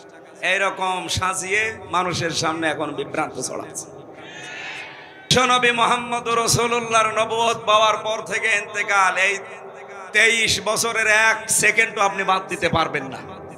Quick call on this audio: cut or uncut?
cut